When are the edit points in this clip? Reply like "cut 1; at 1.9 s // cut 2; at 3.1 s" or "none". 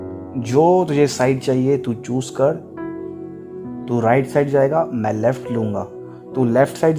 none